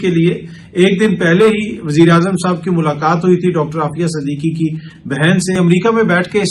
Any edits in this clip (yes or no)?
yes